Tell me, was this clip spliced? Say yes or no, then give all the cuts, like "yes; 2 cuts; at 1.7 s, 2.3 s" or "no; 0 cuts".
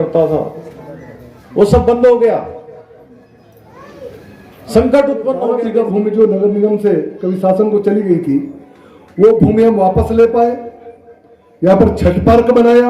yes; 1 cut; at 5.6 s